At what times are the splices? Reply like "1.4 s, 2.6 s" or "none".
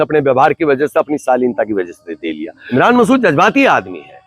2.7 s